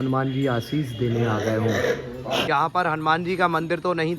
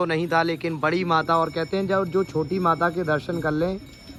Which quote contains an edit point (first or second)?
first